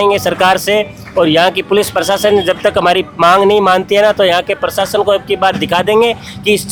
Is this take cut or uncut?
uncut